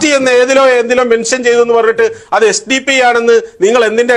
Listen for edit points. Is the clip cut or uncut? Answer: uncut